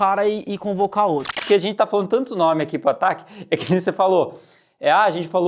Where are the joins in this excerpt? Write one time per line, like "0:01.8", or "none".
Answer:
0:01.4